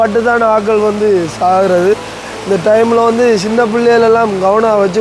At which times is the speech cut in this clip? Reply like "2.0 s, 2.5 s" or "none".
none